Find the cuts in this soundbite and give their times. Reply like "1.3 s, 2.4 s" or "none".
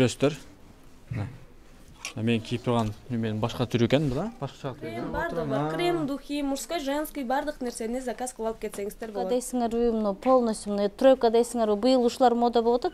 5.0 s, 9.5 s